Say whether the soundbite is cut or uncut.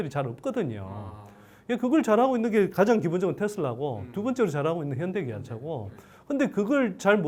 uncut